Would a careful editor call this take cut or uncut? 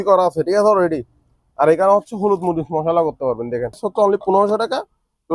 cut